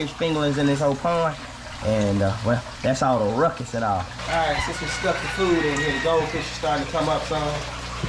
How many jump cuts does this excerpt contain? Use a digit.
1